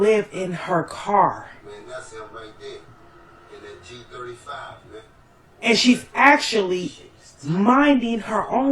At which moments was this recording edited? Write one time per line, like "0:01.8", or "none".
0:01.5